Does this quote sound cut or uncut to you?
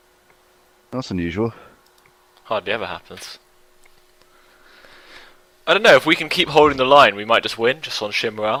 uncut